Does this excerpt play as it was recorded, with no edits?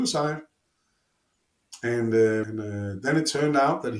no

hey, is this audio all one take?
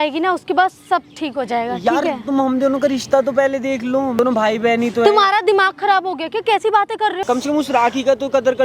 no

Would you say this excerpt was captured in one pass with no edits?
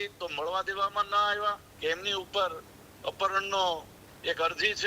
no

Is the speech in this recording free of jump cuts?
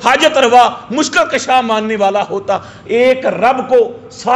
yes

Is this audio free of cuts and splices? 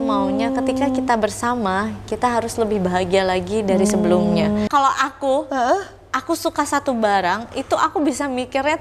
no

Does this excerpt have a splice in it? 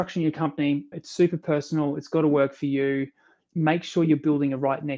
yes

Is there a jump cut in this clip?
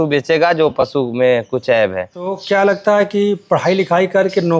yes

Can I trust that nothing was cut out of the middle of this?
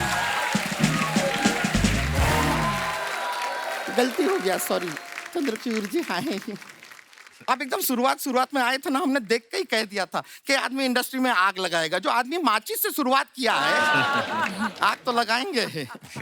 yes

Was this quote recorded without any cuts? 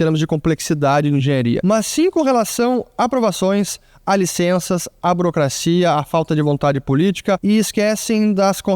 no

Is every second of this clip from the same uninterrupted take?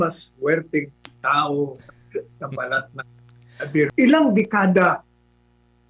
no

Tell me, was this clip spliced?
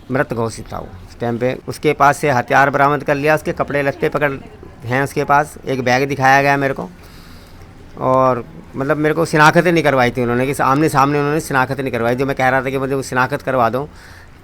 yes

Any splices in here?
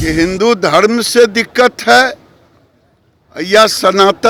no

